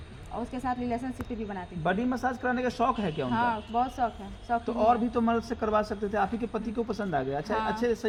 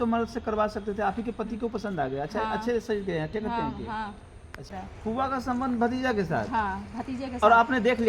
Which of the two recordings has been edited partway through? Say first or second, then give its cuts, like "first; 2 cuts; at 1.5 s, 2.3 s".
second; 1 cut; at 4.7 s